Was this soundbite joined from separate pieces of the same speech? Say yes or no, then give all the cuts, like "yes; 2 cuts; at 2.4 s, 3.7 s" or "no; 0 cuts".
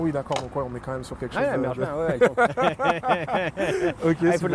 no; 0 cuts